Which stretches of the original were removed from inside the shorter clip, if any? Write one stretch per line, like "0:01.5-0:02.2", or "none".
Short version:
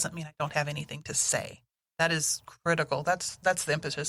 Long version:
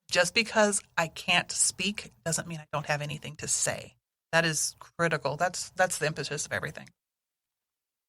none

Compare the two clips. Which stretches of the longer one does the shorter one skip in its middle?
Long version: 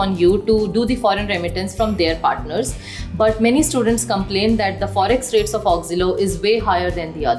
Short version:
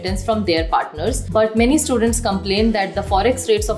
0:02.7-0:03.1

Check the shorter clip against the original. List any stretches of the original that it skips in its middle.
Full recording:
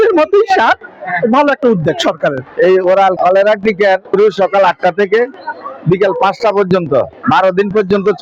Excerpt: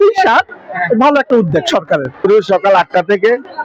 0:02.5-0:04.0

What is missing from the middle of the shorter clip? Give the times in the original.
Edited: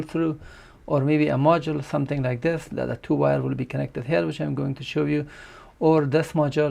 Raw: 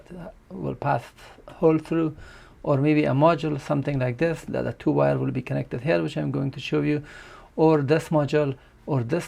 none

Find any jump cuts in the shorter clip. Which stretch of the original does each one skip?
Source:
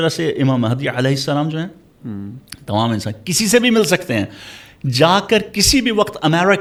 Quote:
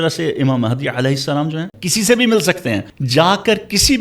0:01.8-0:03.2
0:04.4-0:04.8

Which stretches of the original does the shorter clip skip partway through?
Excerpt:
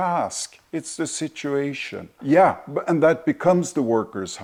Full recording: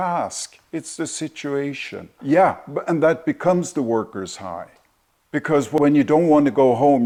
none

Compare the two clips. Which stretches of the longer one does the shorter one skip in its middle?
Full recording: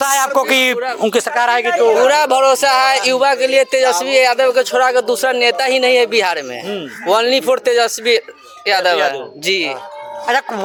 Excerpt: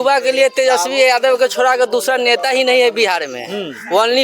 none

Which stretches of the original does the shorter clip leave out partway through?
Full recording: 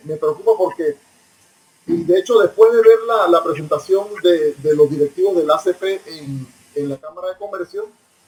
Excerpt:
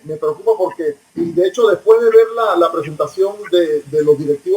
0:01.0-0:01.8

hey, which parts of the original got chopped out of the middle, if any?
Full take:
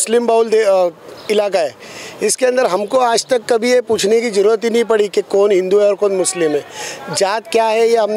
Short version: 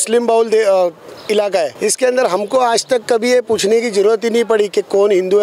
0:01.7-0:02.1

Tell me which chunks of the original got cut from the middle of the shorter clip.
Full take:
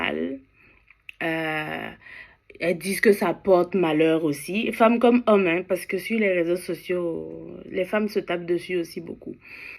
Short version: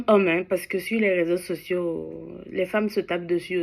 none

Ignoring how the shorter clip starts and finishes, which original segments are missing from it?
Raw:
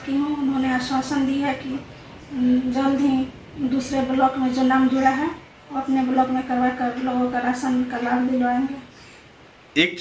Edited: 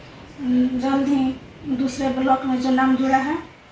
none

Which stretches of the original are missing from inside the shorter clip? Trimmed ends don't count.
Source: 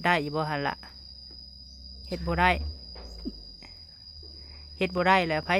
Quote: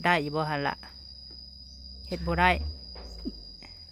none

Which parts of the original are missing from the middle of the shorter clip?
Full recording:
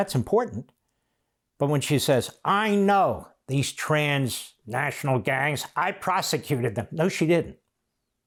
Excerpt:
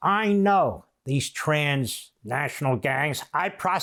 none

